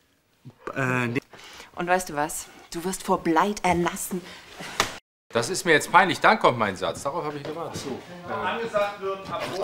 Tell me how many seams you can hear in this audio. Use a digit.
1